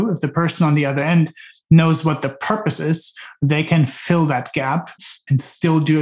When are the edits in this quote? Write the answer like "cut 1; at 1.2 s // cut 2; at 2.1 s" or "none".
cut 1; at 5.1 s